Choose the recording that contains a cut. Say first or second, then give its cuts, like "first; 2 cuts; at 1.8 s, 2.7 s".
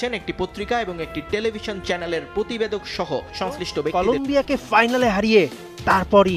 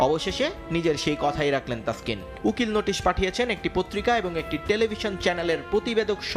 first; 1 cut; at 3.9 s